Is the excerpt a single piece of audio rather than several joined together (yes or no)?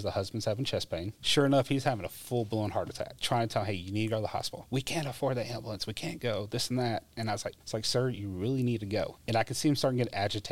no